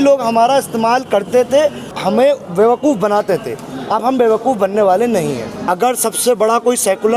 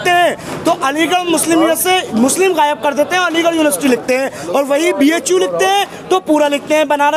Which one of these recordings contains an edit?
first; 2 cuts; at 1.9 s, 5.5 s

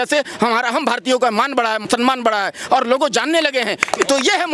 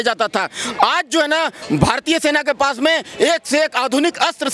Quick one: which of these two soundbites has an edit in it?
first; 1 cut; at 1.8 s

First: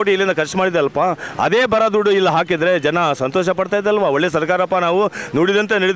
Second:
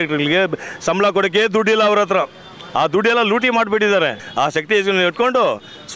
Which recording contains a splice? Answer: second; 1 cut; at 4.2 s

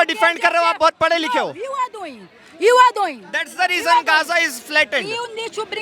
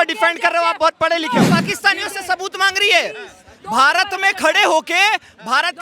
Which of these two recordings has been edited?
second; 1 cut; at 1.5 s

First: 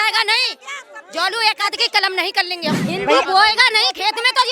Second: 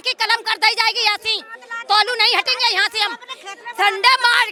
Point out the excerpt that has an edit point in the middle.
first; 1 cut; at 2.8 s

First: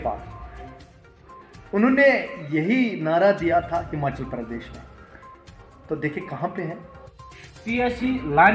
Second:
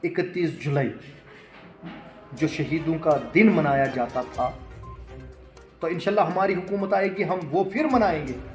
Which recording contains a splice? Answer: first; 1 cut; at 7.2 s

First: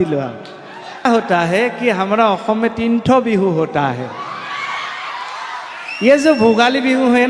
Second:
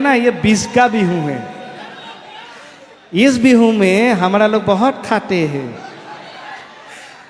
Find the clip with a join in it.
first; 1 cut; at 1.0 s

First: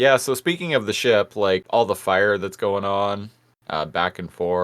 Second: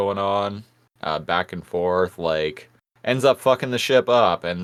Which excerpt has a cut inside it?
first; 1 cut; at 1.6 s

